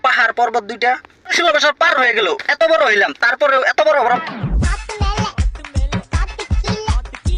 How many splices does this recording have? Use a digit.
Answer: 1